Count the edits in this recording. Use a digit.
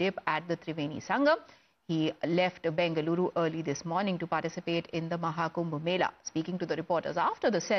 1